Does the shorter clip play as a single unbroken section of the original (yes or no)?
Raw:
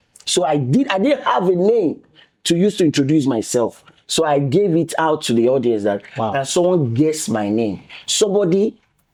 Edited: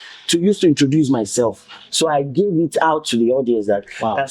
yes